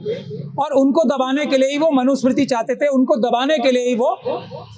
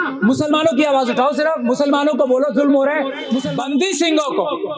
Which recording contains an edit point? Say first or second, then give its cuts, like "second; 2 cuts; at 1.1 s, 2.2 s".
second; 1 cut; at 3.4 s